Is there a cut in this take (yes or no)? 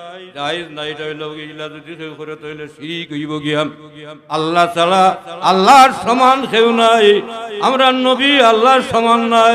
no